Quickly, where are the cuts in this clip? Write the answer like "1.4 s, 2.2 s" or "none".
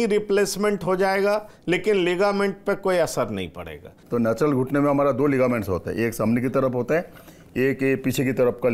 4.0 s